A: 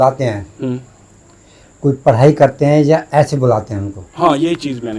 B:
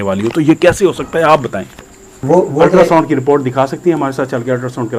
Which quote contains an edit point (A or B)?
B